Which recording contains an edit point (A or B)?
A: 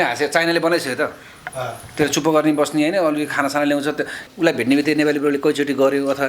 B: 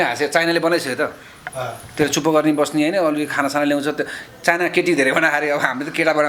A